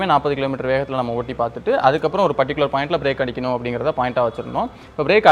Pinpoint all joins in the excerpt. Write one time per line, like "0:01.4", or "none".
none